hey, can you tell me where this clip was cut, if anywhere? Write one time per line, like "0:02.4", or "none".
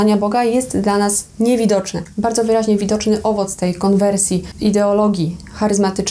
0:02.0
0:04.5